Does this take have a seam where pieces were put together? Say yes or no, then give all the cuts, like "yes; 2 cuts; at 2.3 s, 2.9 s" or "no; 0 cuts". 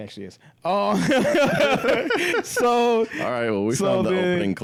no; 0 cuts